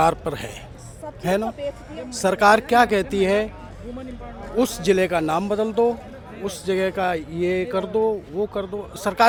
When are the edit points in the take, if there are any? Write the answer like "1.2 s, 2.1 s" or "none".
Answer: none